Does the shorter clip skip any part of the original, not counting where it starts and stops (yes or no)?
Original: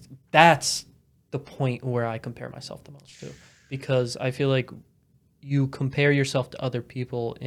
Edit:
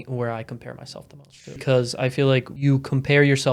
yes